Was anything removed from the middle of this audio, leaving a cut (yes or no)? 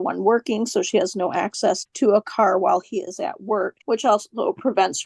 yes